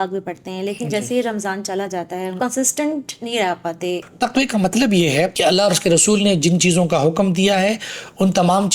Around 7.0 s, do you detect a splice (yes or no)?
no